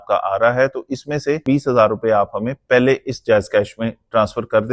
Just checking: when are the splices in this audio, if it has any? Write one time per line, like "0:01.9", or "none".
0:01.4